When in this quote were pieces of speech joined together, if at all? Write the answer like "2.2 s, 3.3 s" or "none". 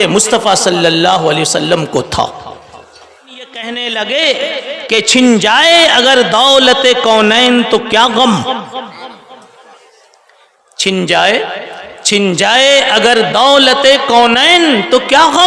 3.6 s